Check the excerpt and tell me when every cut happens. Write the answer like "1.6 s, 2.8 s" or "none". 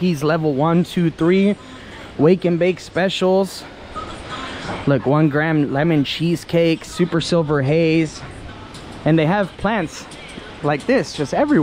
none

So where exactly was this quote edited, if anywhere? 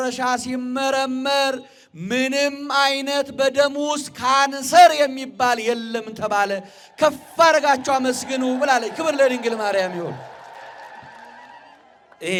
none

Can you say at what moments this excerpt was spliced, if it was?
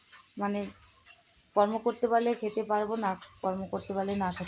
none

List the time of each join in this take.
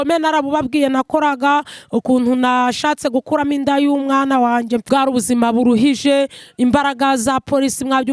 4.8 s

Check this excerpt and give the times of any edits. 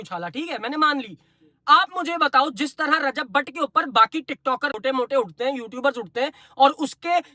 4.8 s

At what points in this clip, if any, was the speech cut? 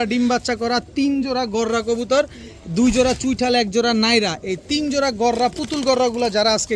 none

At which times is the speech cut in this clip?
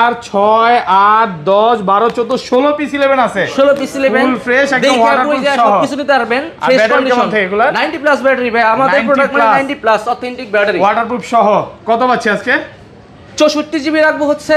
none

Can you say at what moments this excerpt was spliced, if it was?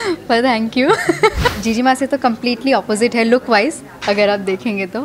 1.6 s

